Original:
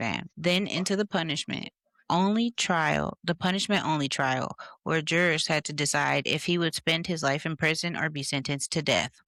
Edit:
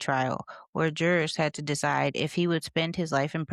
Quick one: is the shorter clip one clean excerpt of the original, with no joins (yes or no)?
yes